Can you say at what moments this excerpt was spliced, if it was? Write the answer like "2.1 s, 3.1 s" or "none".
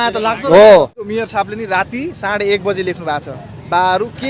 1.1 s